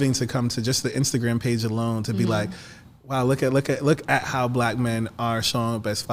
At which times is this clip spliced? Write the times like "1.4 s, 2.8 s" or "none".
none